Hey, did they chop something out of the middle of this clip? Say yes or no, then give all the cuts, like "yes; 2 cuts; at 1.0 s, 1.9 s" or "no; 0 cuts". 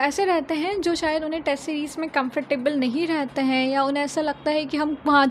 no; 0 cuts